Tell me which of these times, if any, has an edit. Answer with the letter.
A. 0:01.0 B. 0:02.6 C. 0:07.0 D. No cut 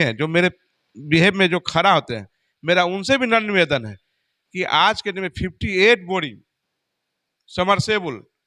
D